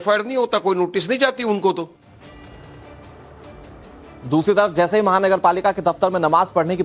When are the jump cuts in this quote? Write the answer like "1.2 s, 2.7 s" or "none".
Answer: 4.4 s